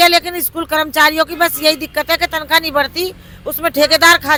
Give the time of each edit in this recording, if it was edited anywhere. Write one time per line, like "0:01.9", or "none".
none